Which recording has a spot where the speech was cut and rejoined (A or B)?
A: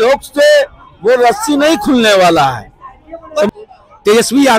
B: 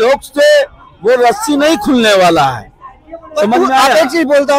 A